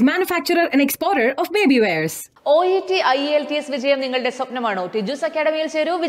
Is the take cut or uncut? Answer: uncut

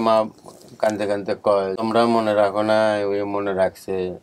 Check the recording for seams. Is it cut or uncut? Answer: cut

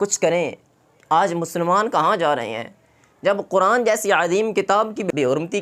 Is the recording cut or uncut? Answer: uncut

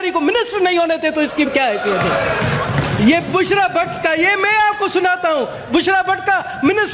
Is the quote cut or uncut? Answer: uncut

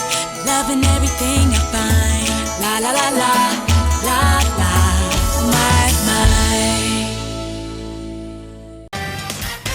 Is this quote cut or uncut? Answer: cut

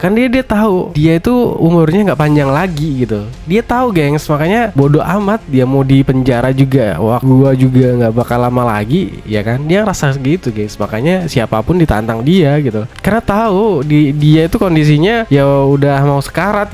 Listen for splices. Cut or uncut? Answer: cut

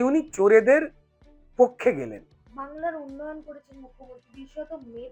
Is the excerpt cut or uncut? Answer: uncut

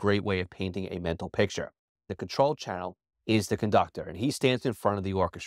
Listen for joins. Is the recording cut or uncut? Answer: cut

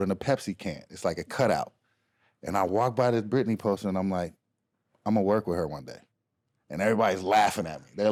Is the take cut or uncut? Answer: uncut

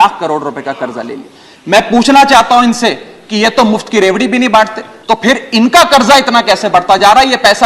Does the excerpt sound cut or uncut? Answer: cut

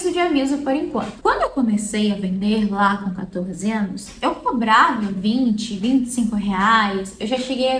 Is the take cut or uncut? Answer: cut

